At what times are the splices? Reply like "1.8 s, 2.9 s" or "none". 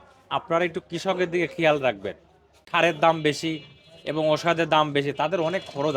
2.6 s